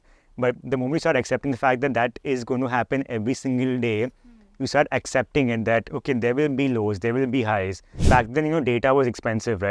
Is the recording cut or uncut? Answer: cut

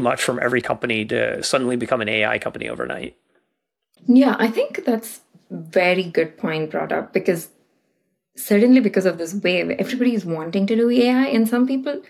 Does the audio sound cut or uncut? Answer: uncut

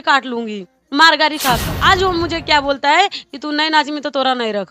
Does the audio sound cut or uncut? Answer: cut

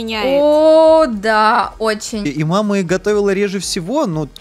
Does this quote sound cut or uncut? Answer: cut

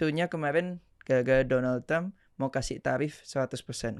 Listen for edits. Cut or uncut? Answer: uncut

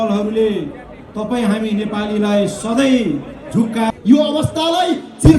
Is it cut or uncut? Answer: cut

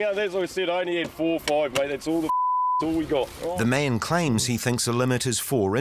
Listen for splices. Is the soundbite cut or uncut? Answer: cut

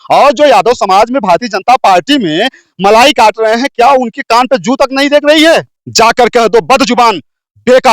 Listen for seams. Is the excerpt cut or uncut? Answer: cut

